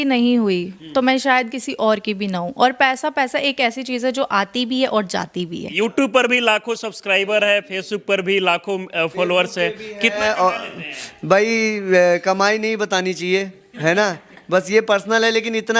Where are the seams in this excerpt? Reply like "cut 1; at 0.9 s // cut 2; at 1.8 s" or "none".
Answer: cut 1; at 5.7 s